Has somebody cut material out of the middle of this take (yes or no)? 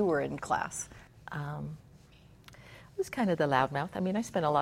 no